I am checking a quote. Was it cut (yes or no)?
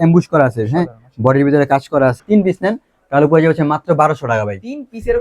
yes